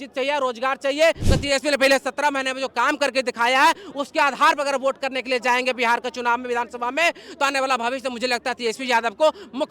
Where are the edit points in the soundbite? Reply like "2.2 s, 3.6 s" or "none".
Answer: 1.3 s